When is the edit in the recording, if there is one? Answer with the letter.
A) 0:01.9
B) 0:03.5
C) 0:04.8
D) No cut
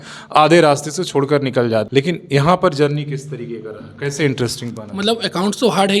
A